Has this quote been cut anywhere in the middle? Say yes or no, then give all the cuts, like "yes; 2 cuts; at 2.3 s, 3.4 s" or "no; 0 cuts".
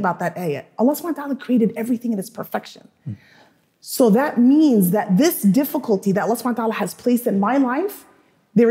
no; 0 cuts